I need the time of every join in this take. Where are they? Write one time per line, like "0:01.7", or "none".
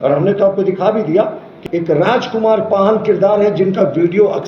0:01.5